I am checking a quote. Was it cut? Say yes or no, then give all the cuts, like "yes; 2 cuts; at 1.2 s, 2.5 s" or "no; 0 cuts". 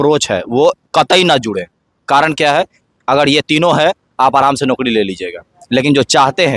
no; 0 cuts